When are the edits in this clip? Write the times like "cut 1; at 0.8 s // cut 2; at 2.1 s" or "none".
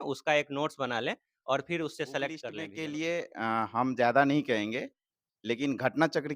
cut 1; at 2.6 s